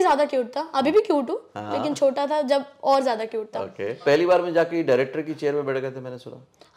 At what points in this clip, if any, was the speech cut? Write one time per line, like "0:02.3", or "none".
0:04.0